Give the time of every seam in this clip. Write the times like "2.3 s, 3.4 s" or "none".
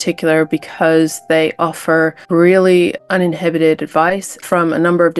none